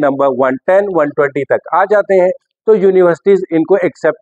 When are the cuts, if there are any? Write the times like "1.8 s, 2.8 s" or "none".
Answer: none